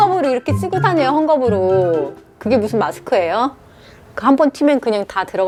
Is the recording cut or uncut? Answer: uncut